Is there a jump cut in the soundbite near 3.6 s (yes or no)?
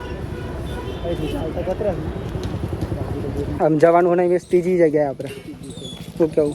yes